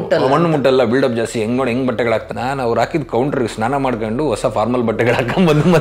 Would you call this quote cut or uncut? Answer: cut